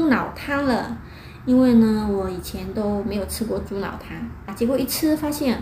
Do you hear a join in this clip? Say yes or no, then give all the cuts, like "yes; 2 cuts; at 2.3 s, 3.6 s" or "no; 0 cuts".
yes; 1 cut; at 4.5 s